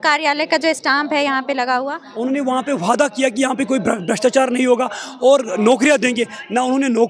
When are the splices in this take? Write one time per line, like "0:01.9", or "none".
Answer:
0:02.0

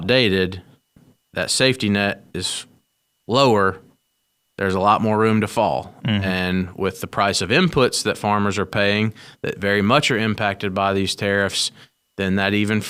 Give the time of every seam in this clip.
none

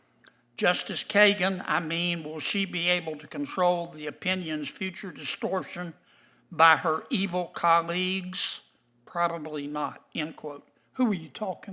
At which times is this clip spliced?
none

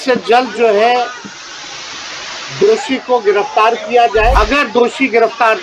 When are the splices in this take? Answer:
0:04.3

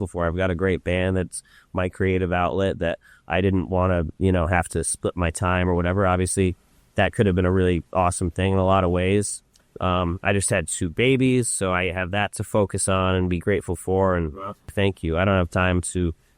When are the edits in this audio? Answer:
0:14.7

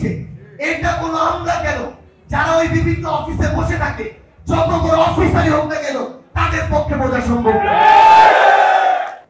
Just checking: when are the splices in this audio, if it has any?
none

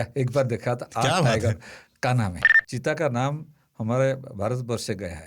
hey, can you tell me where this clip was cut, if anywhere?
0:02.4

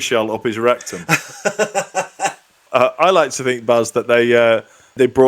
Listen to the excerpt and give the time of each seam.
0:02.6

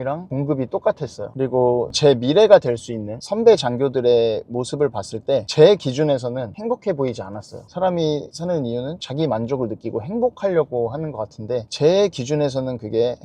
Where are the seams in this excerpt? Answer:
0:01.3
0:07.7

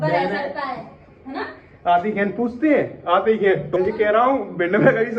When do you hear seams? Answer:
0:03.7

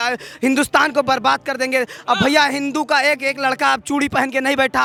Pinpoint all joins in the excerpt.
none

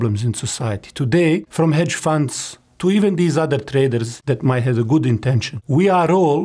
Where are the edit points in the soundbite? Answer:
0:01.5
0:04.1
0:05.5

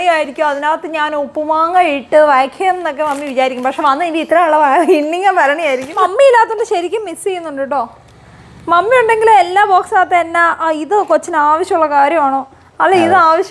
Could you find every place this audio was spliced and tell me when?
0:06.0

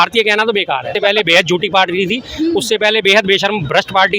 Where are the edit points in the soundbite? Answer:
0:00.9

